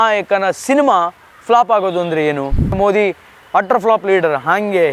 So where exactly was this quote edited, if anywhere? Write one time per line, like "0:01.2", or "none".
0:02.8